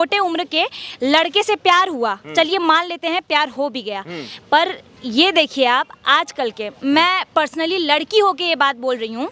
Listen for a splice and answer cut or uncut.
uncut